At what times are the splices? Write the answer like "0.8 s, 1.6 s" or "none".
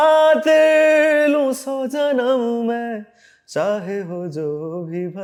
none